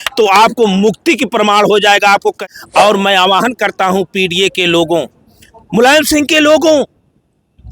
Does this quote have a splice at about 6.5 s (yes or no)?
no